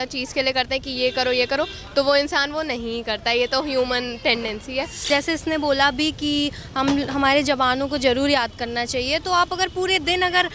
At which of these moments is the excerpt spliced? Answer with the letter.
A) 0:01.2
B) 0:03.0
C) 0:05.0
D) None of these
C